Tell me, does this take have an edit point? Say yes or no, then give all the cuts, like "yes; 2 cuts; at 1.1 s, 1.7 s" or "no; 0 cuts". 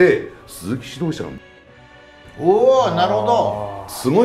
no; 0 cuts